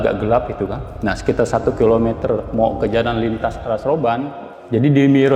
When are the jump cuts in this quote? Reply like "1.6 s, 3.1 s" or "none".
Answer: 4.4 s